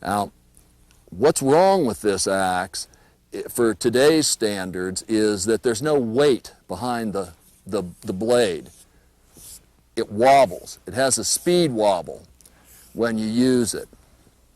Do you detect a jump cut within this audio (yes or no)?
yes